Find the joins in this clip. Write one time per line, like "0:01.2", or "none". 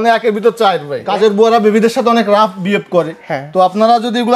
0:00.9